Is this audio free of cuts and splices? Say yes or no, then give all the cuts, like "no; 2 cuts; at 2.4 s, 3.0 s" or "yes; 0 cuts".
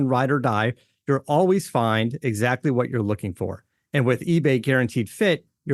yes; 0 cuts